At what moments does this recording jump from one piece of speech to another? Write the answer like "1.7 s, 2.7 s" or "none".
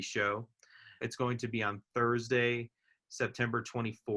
1.0 s

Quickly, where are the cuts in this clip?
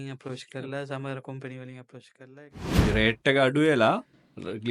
2.6 s

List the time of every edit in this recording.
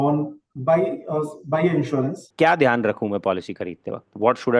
2.2 s

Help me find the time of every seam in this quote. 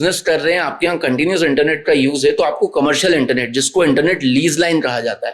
none

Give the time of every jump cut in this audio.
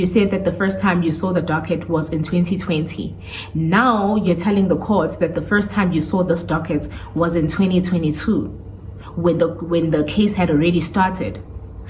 none

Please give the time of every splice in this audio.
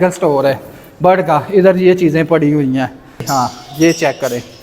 3.2 s

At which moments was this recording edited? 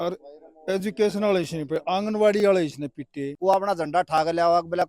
3.2 s

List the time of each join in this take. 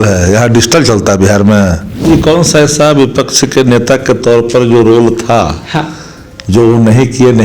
2.1 s

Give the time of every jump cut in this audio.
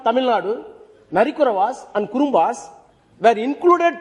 none

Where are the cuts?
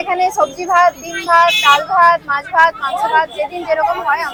none

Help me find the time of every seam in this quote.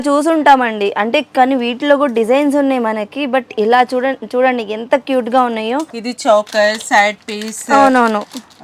6.0 s

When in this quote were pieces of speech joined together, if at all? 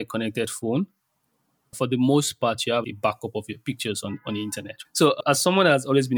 1.8 s, 2.8 s, 5.2 s

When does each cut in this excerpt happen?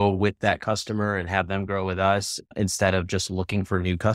2.4 s

